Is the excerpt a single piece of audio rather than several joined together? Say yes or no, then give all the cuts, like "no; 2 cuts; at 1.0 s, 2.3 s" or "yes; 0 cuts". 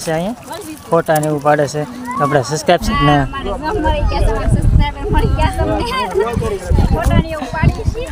yes; 0 cuts